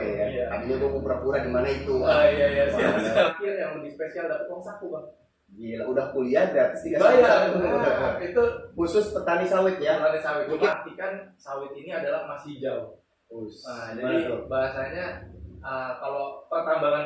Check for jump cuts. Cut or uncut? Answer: cut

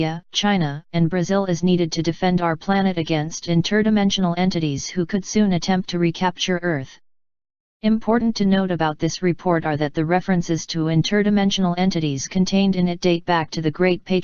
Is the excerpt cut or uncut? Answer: cut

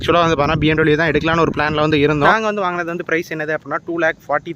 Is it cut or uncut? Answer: cut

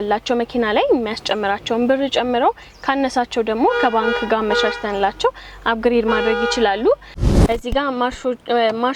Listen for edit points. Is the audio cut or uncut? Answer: cut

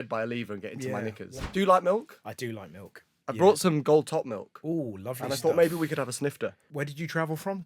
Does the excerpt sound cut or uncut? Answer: cut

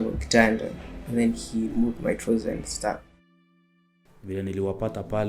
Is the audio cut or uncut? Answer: cut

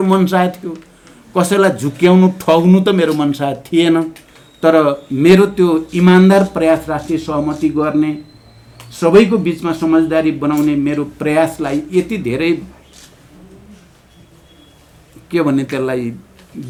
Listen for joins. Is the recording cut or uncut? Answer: uncut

